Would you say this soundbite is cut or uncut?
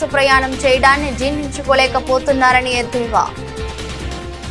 cut